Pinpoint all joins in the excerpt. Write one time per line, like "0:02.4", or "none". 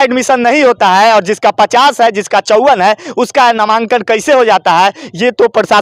none